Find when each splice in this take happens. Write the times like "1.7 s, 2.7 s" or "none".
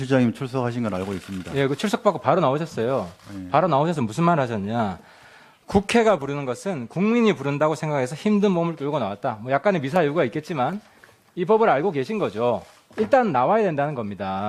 1.1 s